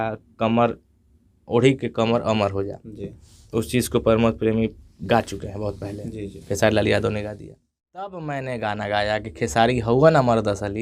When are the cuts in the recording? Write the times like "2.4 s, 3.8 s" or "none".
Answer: 8.1 s